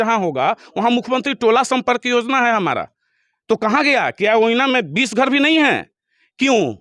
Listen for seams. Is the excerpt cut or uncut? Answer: uncut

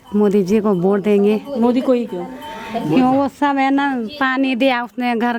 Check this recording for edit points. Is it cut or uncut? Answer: uncut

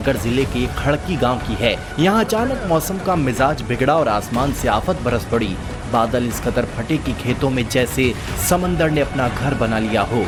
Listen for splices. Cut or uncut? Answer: uncut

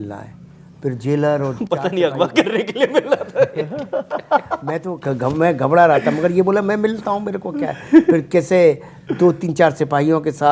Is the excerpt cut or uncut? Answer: uncut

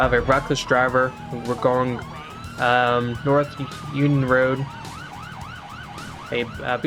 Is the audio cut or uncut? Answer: uncut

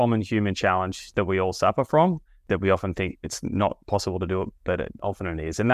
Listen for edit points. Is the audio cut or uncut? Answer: cut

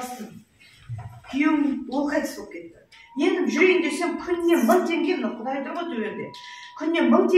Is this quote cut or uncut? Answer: uncut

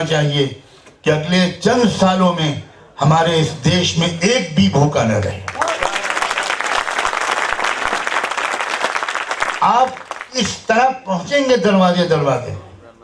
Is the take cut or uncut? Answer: uncut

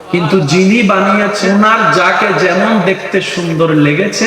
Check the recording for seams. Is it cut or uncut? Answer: cut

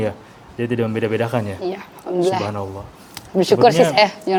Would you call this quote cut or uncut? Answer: uncut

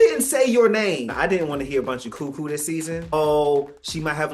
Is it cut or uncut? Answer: cut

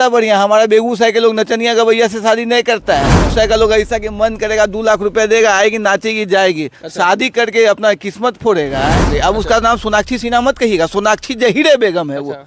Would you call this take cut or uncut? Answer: cut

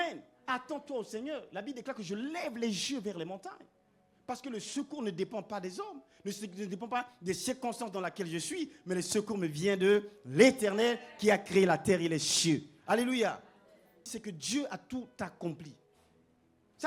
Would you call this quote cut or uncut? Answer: cut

